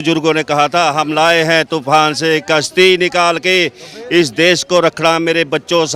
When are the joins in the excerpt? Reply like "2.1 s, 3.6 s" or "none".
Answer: none